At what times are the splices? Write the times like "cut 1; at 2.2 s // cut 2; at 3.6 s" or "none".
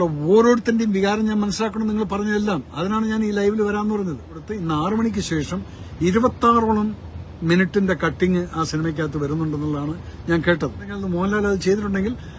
cut 1; at 4.5 s // cut 2; at 11.0 s